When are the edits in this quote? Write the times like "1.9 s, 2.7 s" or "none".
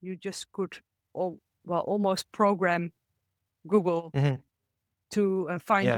none